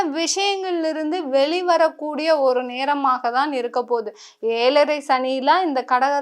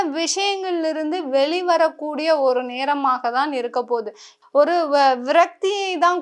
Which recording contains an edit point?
second; 1 cut; at 4.3 s

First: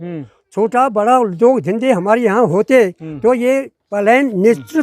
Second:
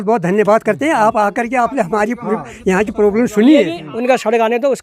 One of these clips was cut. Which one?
second; 1 cut; at 3.8 s

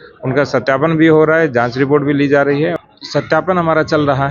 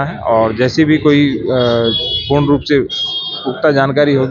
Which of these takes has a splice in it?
first; 1 cut; at 2.7 s

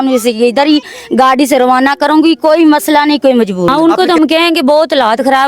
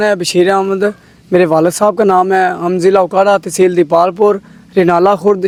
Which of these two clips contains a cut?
first; 1 cut; at 3.7 s

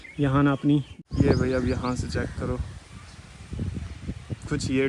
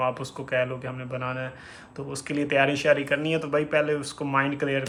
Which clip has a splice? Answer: first; 1 cut; at 0.9 s

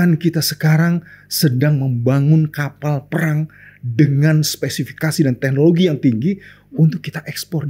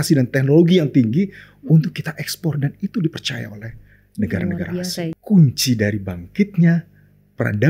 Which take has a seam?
second; 1 cut; at 5.1 s

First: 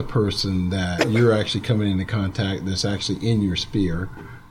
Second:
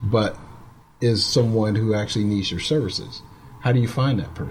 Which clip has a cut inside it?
first; 1 cut; at 1.0 s

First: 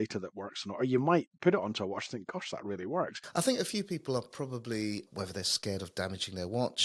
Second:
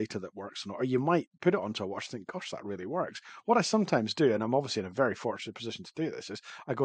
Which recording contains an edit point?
first; 2 cuts; at 3.2 s, 5.1 s

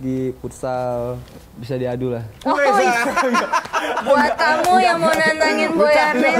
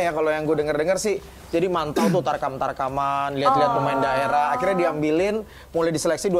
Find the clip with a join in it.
first; 1 cut; at 1.2 s

